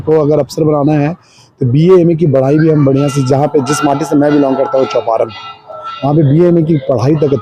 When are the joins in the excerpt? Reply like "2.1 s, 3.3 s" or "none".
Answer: none